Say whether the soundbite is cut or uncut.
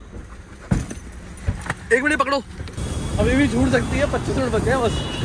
cut